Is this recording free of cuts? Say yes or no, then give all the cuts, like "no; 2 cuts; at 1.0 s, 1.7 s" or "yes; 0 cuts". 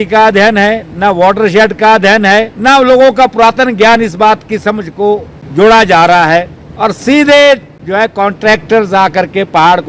no; 4 cuts; at 2.5 s, 5.4 s, 6.6 s, 7.8 s